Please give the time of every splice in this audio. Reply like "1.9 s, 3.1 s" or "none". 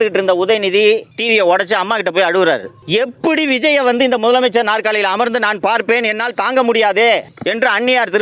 1.1 s, 2.7 s, 7.3 s